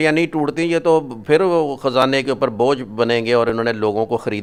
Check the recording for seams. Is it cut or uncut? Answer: uncut